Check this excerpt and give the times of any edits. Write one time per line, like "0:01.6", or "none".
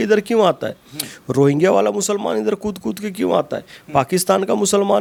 none

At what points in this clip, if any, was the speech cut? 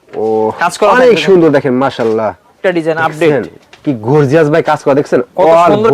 0:02.6

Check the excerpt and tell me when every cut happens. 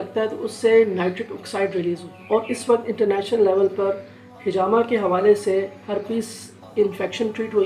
0:02.1

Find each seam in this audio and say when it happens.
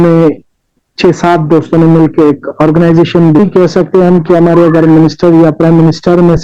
0:03.4

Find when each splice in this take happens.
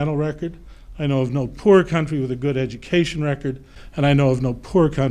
none

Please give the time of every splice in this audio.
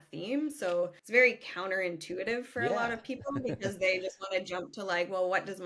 0:01.0

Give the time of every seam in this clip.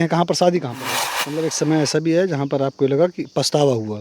0:01.2

